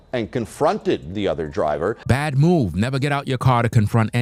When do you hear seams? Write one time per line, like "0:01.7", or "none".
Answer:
none